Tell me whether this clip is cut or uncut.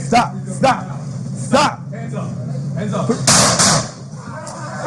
cut